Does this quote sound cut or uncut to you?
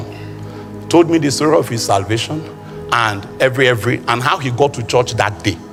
uncut